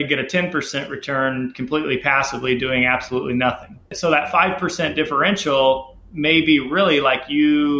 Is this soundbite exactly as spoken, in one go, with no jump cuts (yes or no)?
yes